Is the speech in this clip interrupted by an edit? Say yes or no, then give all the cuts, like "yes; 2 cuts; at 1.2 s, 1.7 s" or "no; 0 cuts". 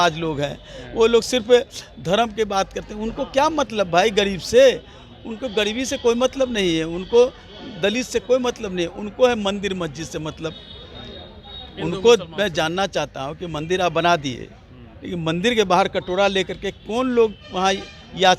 no; 0 cuts